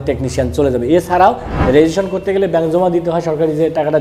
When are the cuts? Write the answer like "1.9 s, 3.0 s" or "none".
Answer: 1.5 s